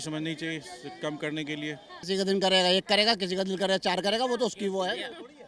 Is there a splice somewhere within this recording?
yes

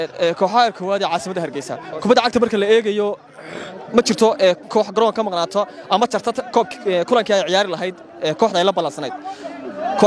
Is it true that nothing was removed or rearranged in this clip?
yes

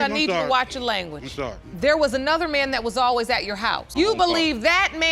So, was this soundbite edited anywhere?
no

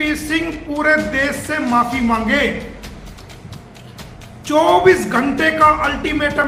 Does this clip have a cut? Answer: no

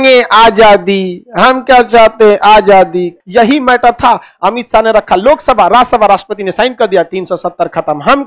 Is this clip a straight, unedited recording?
no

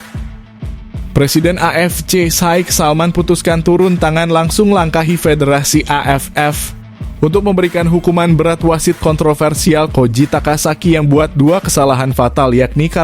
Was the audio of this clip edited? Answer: yes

